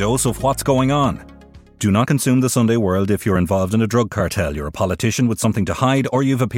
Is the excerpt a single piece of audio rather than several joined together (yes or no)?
yes